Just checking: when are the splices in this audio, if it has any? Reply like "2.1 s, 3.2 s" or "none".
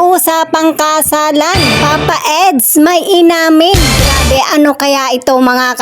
1.7 s

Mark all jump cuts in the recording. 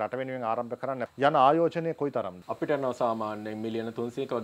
1.0 s, 2.4 s

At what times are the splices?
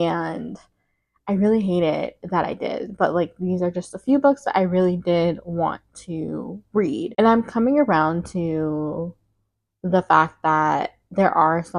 none

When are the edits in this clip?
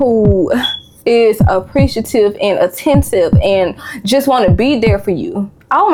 none

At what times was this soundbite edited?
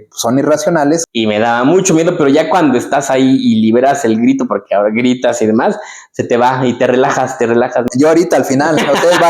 1.1 s, 7.9 s

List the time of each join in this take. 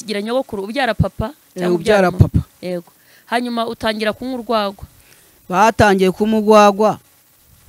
none

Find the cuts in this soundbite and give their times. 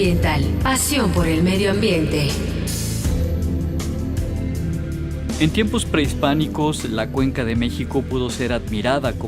7.5 s

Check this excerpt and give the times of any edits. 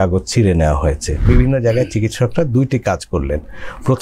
1.3 s

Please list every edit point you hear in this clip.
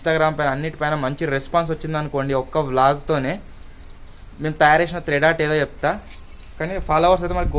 none

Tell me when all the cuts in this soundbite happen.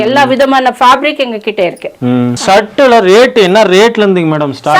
2.4 s

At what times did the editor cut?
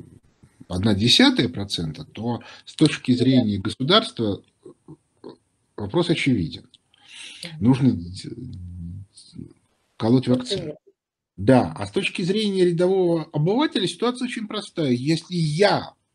none

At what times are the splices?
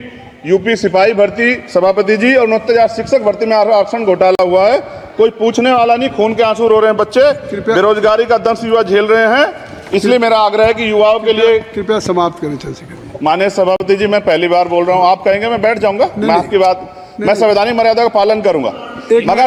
none

